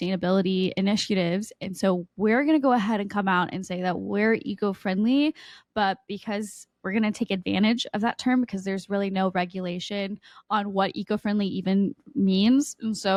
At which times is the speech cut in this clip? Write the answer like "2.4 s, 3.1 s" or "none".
none